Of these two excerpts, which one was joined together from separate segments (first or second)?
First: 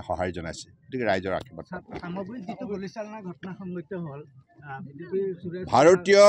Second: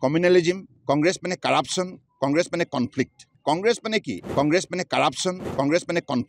second